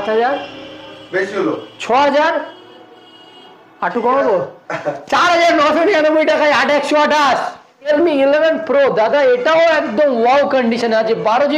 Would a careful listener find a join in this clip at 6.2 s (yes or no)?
no